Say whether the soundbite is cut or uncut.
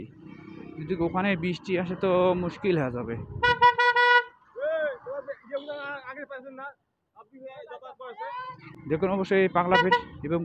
cut